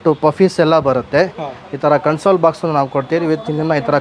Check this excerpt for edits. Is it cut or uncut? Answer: uncut